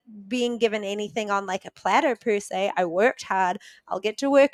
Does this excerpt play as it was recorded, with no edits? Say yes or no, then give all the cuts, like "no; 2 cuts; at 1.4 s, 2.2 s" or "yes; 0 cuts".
yes; 0 cuts